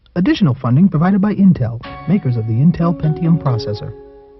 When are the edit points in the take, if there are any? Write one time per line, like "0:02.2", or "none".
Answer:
none

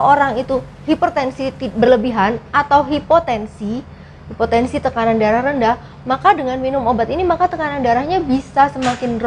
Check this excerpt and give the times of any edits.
none

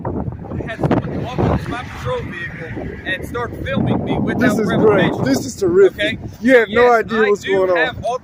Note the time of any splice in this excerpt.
none

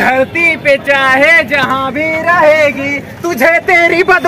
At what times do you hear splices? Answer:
none

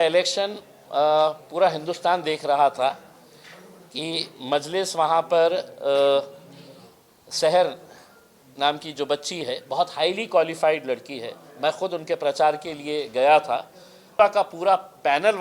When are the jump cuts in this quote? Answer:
0:14.0

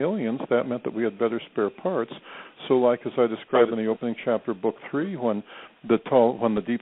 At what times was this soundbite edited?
0:02.5

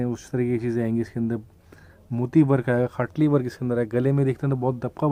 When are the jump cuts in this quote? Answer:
none

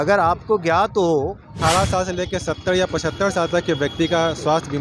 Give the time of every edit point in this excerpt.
0:01.6

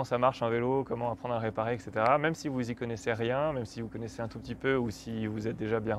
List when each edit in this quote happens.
none

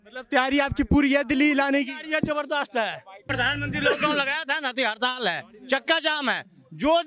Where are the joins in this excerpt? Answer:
0:03.1

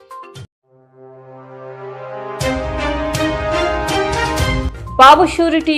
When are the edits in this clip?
0:04.7

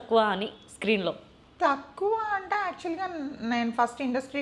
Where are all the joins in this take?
none

